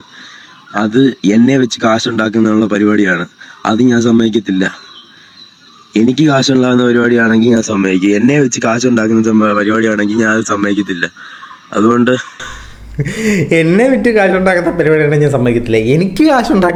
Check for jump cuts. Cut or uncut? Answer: uncut